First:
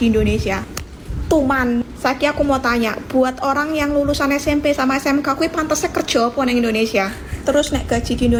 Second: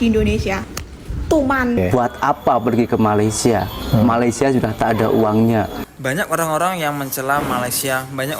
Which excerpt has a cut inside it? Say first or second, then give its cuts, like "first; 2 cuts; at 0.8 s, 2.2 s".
second; 2 cuts; at 1.8 s, 5.9 s